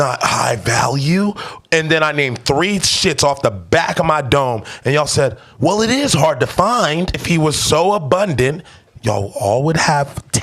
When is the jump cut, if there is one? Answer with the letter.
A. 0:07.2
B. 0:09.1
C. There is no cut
A